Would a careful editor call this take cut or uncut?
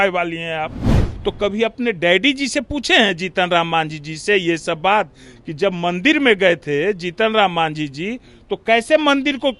uncut